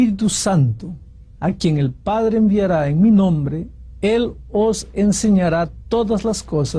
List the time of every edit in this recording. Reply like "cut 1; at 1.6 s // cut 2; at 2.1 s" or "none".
cut 1; at 4.9 s